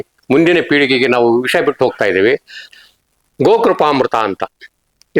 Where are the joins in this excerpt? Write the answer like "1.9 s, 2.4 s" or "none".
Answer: 2.6 s